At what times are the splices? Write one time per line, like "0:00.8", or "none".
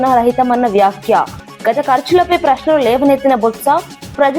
none